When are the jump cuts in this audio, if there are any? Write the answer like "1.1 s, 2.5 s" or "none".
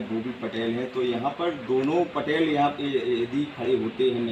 none